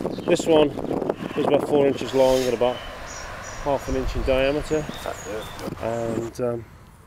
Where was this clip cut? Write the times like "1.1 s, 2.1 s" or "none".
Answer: 5.5 s